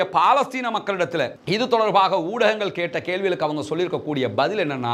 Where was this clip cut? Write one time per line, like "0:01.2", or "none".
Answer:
none